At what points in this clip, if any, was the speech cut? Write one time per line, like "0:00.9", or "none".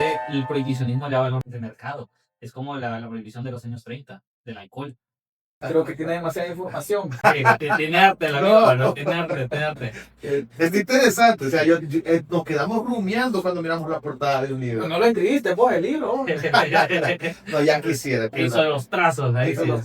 0:01.4
0:05.5